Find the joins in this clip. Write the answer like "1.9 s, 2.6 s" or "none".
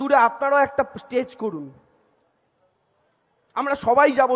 none

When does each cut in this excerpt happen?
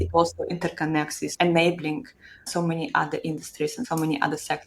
1.3 s, 2.5 s, 3.8 s

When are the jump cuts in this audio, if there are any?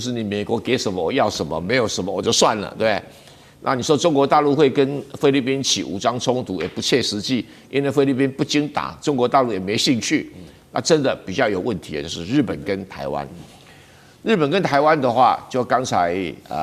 none

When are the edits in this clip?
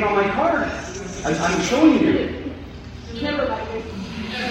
none

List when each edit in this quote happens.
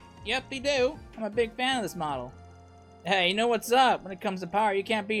none

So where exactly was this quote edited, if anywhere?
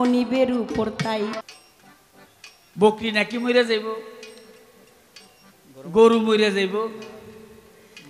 1.4 s

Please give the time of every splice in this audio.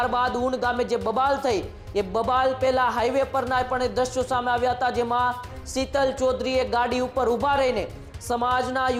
none

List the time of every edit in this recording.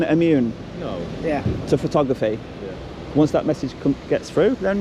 none

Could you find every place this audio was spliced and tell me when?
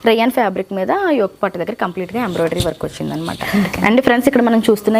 3.4 s

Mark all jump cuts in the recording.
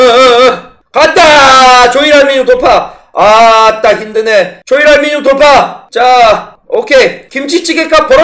7.3 s

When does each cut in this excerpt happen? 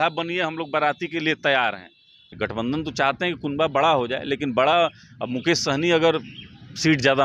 2.3 s

